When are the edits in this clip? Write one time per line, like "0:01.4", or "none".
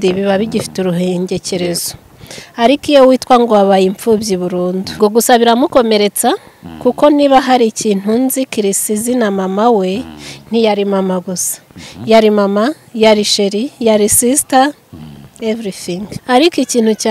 0:05.0
0:16.1